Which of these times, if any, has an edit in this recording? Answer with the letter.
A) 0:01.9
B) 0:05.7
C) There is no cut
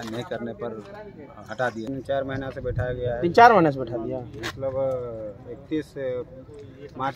A